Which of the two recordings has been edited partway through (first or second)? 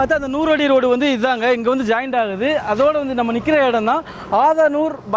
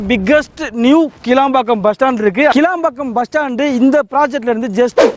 second